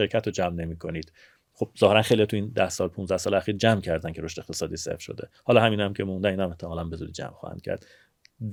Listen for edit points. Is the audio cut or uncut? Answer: uncut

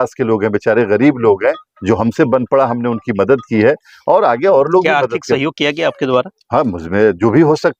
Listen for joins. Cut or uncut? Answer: uncut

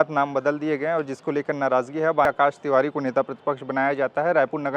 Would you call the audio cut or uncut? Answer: cut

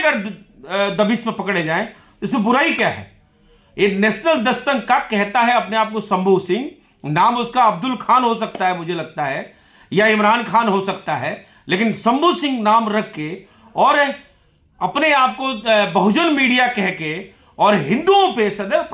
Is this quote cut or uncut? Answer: uncut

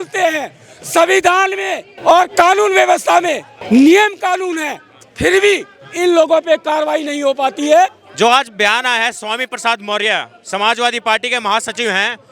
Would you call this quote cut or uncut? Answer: cut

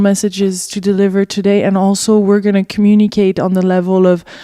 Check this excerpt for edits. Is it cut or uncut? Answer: cut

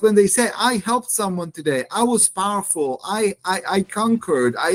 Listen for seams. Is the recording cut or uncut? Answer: uncut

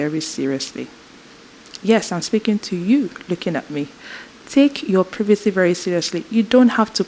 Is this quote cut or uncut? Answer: uncut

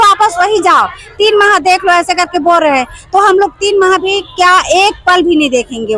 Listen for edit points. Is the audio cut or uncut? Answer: uncut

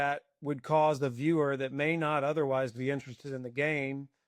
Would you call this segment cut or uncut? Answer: uncut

